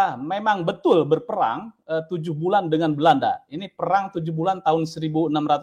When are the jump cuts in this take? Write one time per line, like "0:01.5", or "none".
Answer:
none